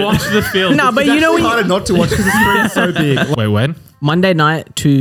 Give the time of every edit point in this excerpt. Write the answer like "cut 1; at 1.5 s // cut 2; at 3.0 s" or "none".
cut 1; at 3.3 s

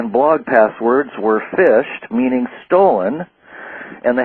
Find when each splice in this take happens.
none

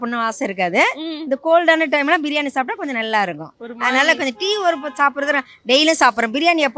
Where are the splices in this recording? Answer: none

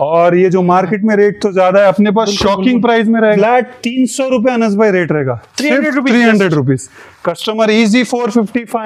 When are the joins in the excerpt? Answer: cut 1; at 3.4 s

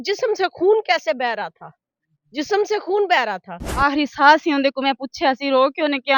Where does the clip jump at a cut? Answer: cut 1; at 3.8 s

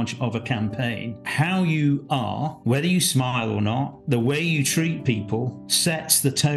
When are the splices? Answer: cut 1; at 1.2 s // cut 2; at 2.6 s // cut 3; at 4.0 s // cut 4; at 5.6 s

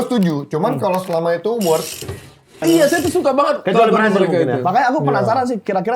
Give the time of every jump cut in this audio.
cut 1; at 2.4 s

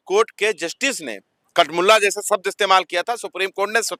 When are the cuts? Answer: none

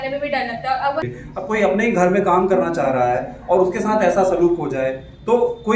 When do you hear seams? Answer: cut 1; at 1.0 s

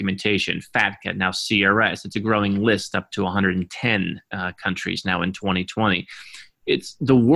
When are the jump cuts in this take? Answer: none

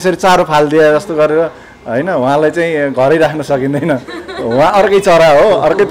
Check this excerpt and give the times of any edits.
none

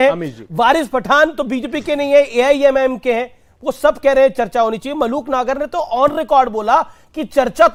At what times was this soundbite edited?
none

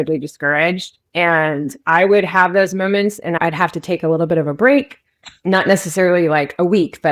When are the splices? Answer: cut 1; at 3.4 s

